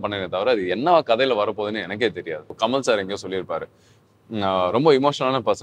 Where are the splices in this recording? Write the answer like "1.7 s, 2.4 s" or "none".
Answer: 2.5 s